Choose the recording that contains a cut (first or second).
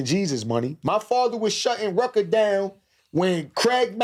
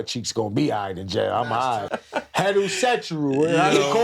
second